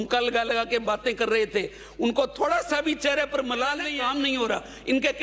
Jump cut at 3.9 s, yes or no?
yes